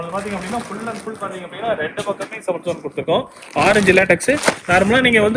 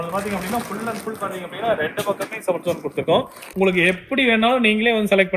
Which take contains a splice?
second; 1 cut; at 3.5 s

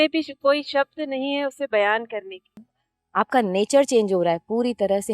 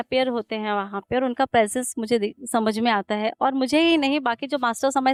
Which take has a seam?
first; 1 cut; at 2.7 s

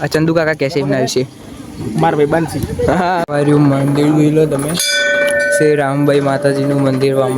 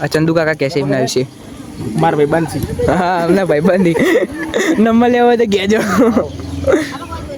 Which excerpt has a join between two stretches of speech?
first; 1 cut; at 3.2 s

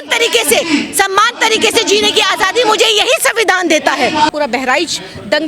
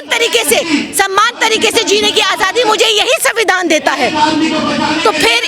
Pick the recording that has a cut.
first; 1 cut; at 4.3 s

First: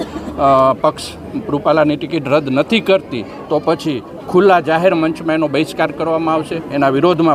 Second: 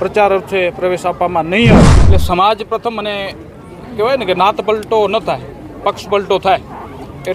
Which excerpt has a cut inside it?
second; 1 cut; at 2.0 s

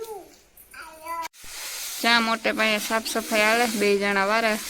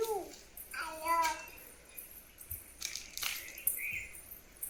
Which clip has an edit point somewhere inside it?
first; 1 cut; at 1.3 s

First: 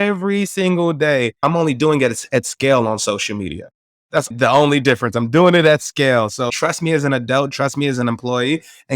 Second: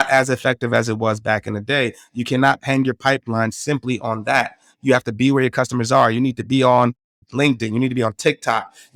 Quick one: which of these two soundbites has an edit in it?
first; 3 cuts; at 1.4 s, 4.3 s, 6.5 s

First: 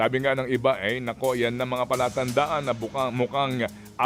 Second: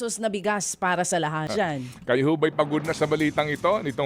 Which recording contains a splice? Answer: second; 1 cut; at 1.4 s

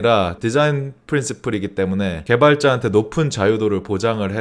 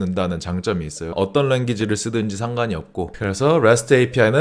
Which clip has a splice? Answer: second; 1 cut; at 3.1 s

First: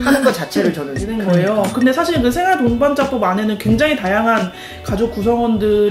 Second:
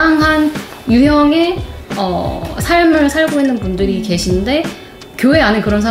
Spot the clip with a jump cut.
first; 1 cut; at 1.1 s

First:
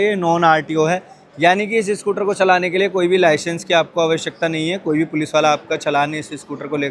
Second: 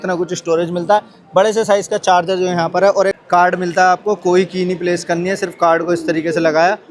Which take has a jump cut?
second; 1 cut; at 3.2 s

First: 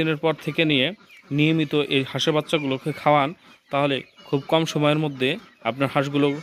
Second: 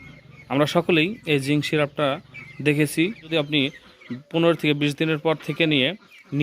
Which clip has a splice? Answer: second; 1 cut; at 3.3 s

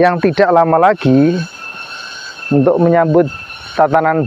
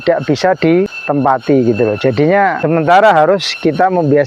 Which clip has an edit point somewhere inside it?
second; 2 cuts; at 1.0 s, 2.6 s

